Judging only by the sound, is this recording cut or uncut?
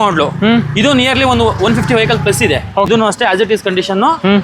cut